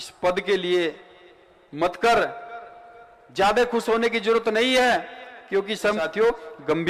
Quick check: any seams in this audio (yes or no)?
yes